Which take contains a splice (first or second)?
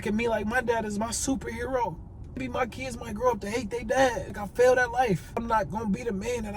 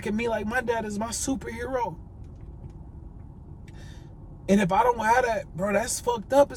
first